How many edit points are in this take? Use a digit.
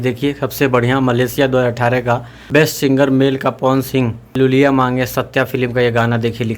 2